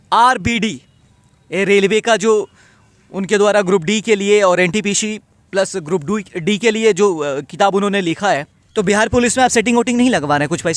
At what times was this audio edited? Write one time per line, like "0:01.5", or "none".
0:08.6